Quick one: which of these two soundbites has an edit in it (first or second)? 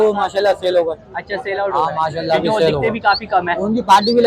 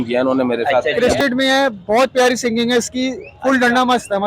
second